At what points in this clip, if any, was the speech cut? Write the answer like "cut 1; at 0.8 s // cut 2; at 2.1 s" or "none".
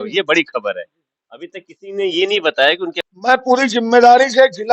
cut 1; at 3.0 s